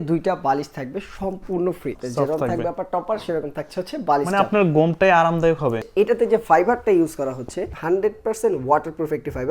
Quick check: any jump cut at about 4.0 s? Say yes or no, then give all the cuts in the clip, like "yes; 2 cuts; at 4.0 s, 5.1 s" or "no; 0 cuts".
no; 3 cuts; at 2.0 s, 5.8 s, 7.7 s